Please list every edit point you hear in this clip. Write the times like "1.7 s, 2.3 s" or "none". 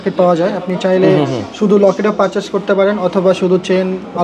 none